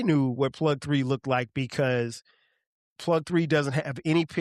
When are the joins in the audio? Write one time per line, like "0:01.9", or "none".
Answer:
none